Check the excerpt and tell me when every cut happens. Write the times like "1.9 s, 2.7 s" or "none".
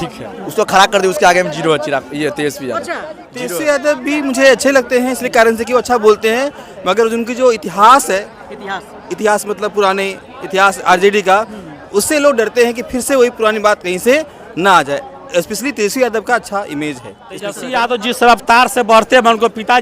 3.2 s, 17.6 s